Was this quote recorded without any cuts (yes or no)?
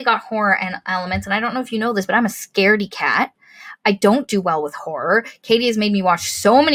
yes